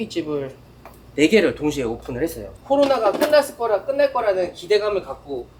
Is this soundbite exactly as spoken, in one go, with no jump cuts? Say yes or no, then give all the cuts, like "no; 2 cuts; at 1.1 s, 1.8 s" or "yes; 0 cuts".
yes; 0 cuts